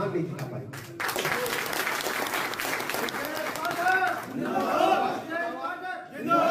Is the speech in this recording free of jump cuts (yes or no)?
yes